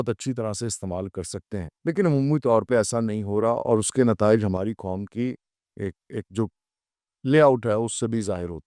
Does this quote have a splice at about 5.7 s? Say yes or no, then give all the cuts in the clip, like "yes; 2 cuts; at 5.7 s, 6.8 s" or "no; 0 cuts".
no; 1 cut; at 1.7 s